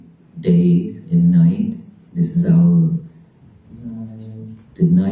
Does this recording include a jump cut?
no; 0 cuts

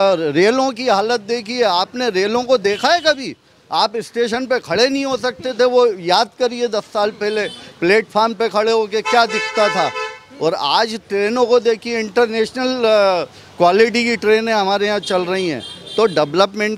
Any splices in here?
no; 0 cuts

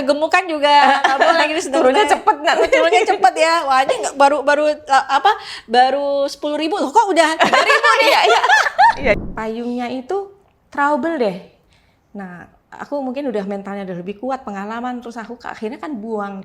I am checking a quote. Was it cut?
yes; 1 cut; at 9.2 s

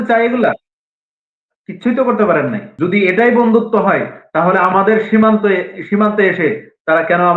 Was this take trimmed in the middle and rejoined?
yes; 1 cut; at 2.7 s

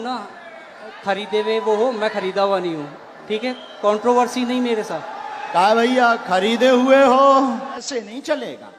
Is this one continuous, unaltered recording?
no; 1 cut; at 7.8 s

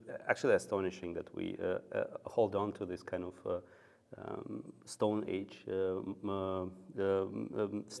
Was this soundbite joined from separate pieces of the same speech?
no; 0 cuts

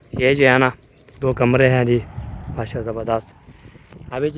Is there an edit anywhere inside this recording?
yes; 1 cut; at 1.1 s

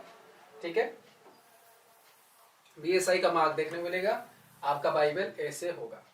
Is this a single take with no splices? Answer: yes; 0 cuts

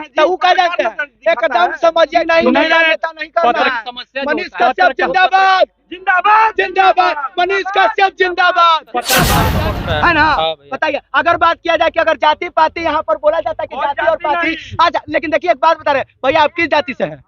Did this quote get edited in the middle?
yes; 2 cuts; at 2.2 s, 9.5 s

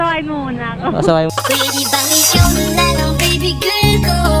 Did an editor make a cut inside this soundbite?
no; 0 cuts

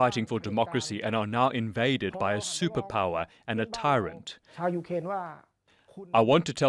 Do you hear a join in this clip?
yes; 1 cut; at 4.5 s

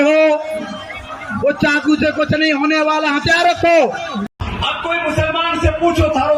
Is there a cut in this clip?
yes; 1 cut; at 4.4 s

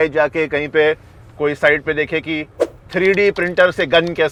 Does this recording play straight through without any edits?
yes; 0 cuts

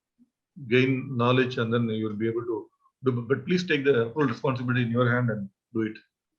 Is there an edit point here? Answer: no; 0 cuts

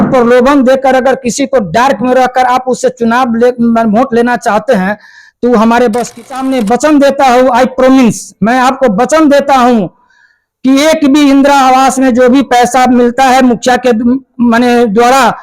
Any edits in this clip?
yes; 1 cut; at 6.2 s

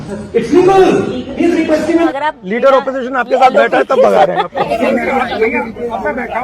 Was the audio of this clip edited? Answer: yes; 2 cuts; at 2.1 s, 4.7 s

